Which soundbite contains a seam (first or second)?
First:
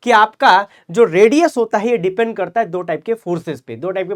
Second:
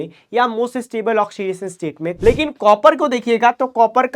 second